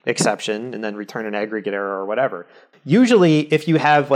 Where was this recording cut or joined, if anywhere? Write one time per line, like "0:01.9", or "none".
0:02.7